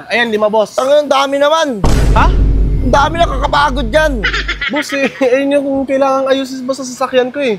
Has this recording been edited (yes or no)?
no